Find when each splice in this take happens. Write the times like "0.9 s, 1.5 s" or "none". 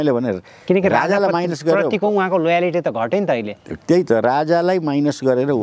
none